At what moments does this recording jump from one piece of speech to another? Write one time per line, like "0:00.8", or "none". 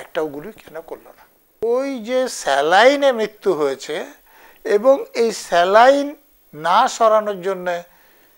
0:01.6